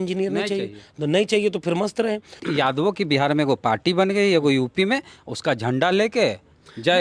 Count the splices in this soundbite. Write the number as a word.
one